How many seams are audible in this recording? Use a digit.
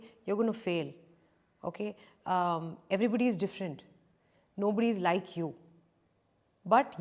0